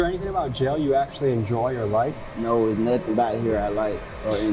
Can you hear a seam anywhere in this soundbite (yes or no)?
no